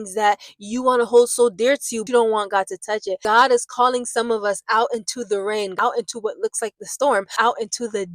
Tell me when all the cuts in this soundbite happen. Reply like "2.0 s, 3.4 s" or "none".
2.0 s, 3.2 s, 5.7 s, 7.3 s